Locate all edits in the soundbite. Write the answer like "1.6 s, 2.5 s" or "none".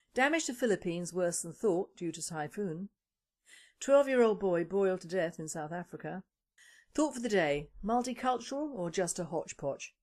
1.7 s